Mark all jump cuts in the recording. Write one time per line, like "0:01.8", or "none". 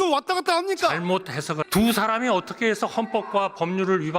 0:01.6